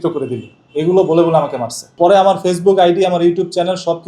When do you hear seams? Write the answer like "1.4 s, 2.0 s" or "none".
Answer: 1.9 s